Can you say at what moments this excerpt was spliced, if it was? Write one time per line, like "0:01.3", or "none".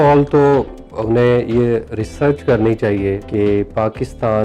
0:03.2